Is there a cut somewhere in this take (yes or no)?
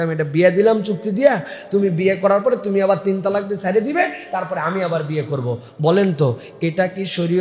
no